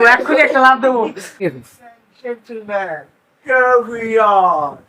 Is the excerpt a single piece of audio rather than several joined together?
no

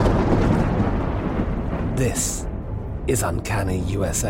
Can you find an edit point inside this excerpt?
no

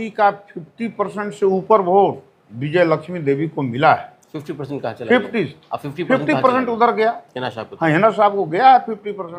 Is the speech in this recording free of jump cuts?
yes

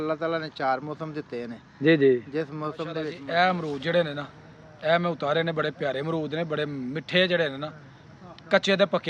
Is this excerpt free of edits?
no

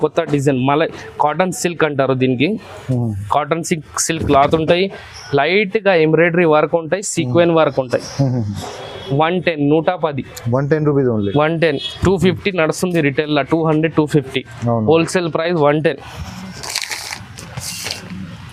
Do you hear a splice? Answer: no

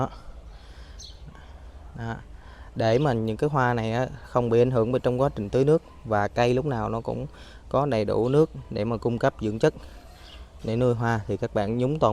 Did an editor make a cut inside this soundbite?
no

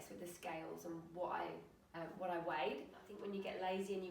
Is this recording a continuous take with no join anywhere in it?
no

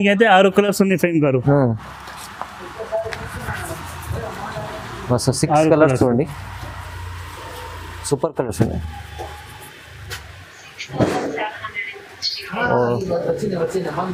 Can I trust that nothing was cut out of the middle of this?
yes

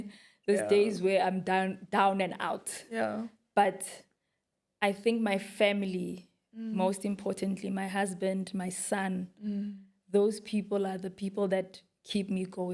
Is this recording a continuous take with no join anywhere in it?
yes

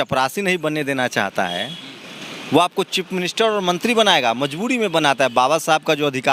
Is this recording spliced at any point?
no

